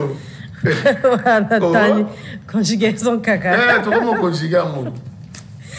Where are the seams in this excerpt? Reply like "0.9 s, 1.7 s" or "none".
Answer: none